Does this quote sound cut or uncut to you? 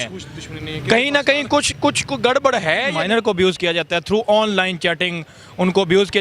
cut